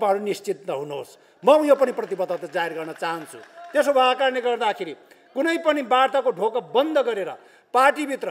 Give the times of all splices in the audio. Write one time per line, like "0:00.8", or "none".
none